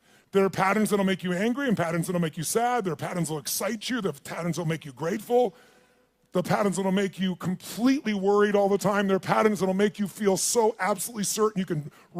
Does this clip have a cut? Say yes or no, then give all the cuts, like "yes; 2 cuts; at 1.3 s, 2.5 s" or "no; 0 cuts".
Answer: yes; 1 cut; at 10.7 s